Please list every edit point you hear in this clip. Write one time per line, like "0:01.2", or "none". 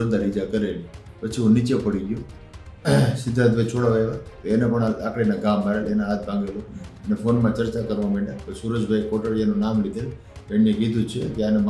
0:06.8